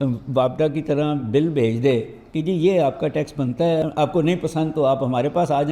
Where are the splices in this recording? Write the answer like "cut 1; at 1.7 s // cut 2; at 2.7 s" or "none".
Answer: cut 1; at 3.8 s